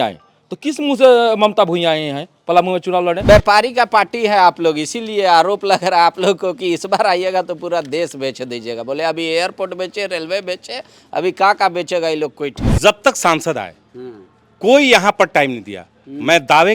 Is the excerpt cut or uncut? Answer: cut